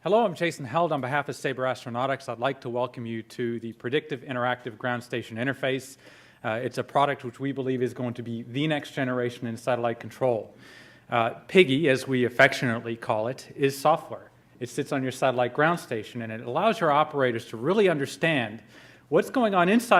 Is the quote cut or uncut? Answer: uncut